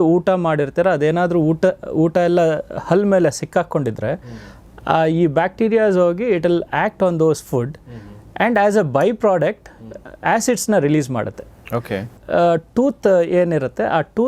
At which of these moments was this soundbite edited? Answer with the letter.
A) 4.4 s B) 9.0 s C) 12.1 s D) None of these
C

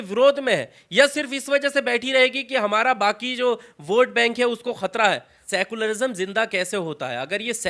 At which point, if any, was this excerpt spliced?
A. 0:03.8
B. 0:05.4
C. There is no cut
B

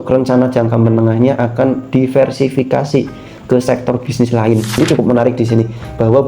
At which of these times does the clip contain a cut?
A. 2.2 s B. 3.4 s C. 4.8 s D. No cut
C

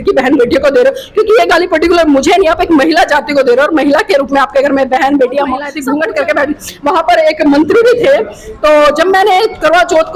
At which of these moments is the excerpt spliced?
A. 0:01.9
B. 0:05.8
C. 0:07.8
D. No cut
B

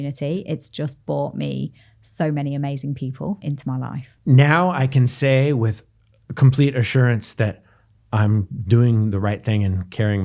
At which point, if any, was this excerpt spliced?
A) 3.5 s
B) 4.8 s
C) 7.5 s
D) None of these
A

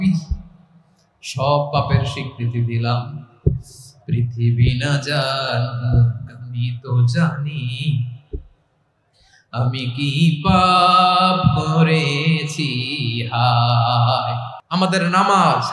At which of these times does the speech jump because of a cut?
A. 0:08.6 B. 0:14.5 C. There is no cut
B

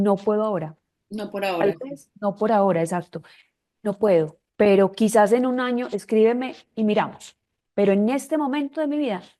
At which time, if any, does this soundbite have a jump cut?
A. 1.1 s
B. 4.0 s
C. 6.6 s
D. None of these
D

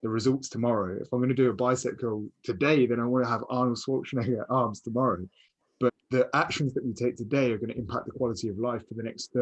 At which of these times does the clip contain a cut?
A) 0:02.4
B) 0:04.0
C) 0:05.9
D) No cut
C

